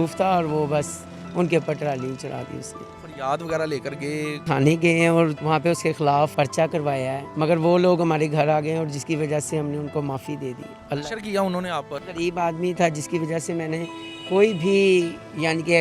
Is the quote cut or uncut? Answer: cut